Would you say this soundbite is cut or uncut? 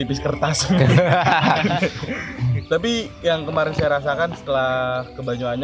uncut